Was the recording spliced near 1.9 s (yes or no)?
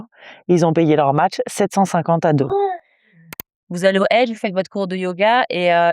no